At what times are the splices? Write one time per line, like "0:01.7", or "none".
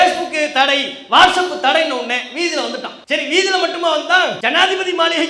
0:02.9
0:04.4